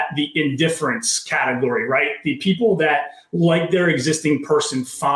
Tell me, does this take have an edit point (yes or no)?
no